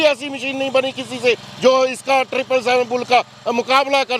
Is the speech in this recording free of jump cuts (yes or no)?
yes